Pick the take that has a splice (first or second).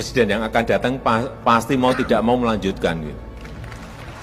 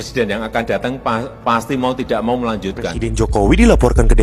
second